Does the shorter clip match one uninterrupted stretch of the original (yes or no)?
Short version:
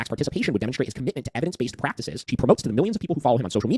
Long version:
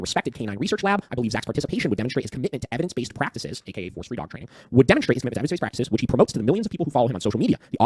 no